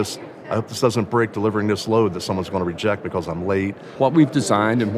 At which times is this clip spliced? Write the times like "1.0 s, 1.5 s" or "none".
3.9 s